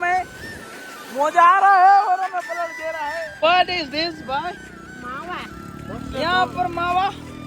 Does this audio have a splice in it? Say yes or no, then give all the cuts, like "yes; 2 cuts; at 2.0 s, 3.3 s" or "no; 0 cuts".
yes; 1 cut; at 3.3 s